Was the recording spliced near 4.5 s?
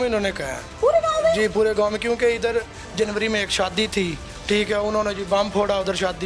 no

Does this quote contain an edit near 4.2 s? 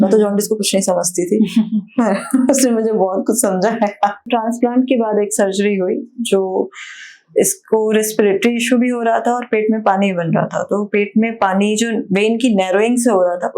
yes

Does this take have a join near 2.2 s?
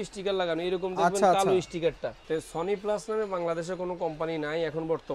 yes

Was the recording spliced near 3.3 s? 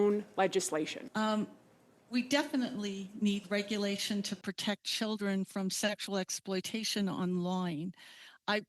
no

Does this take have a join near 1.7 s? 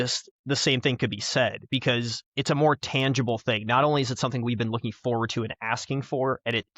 no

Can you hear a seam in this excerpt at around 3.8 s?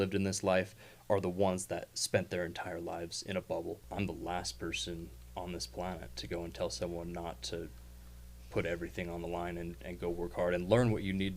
yes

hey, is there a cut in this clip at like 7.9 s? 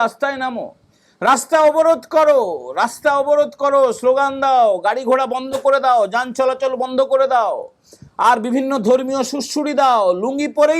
no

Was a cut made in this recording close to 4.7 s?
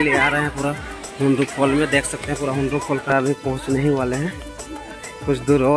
no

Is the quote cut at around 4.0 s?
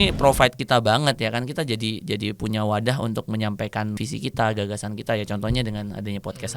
yes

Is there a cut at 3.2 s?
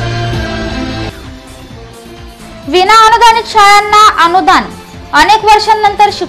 no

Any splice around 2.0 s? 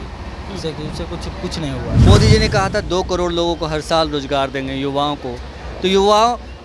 yes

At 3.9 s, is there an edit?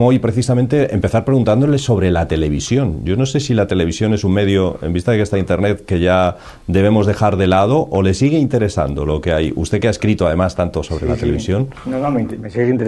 yes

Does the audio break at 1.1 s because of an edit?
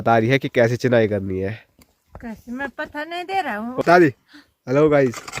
no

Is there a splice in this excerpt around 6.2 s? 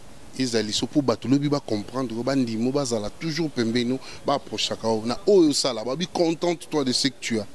no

